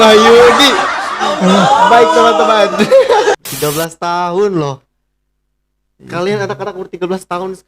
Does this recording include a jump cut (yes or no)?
yes